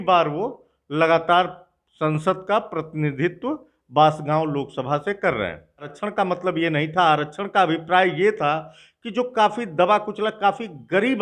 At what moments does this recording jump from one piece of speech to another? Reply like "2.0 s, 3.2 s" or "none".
6.0 s